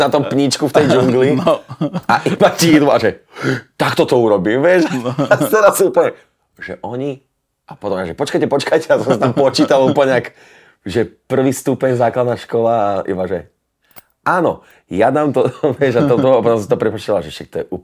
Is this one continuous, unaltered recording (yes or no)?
yes